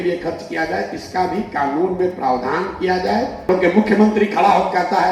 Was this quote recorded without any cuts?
no; 1 cut; at 3.5 s

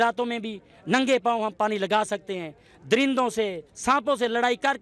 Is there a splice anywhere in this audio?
no; 0 cuts

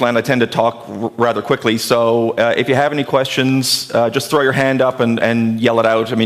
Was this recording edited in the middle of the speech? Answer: no; 0 cuts

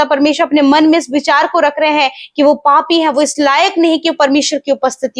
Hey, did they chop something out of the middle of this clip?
no; 0 cuts

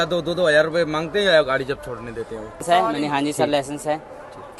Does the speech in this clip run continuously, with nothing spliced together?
no; 1 cut; at 2.6 s

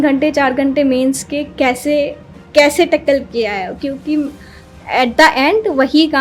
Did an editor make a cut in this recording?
no; 0 cuts

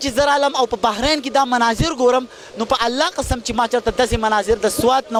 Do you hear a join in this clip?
no; 0 cuts

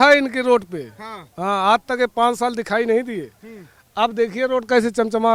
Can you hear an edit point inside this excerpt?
no; 0 cuts

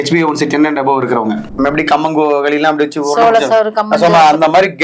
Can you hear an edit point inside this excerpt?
yes; 1 cut; at 1.4 s

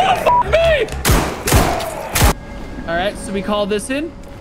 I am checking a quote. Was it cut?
yes; 1 cut; at 2.3 s

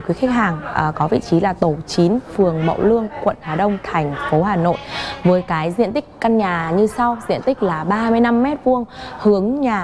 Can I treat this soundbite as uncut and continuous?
yes; 0 cuts

